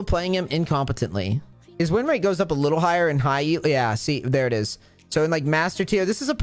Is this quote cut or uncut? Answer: cut